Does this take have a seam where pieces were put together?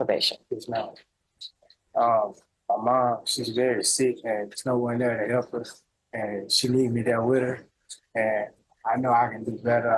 no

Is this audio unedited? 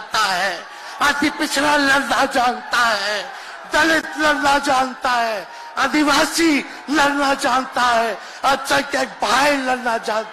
yes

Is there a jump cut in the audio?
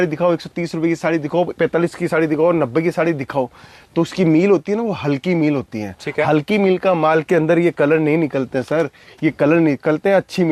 no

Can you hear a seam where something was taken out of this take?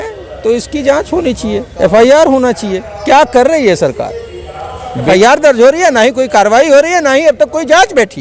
yes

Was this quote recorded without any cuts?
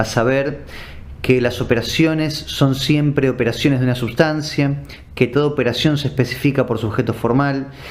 no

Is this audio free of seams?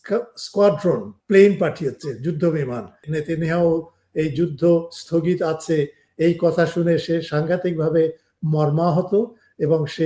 no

